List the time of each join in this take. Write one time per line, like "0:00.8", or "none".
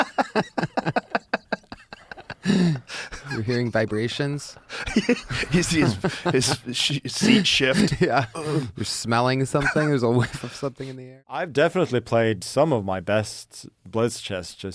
0:11.2